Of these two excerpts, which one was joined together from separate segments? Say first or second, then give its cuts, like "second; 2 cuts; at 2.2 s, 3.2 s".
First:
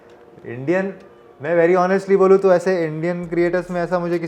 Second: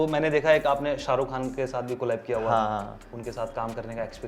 second; 1 cut; at 3.1 s